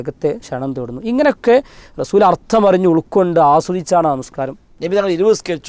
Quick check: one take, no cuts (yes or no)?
no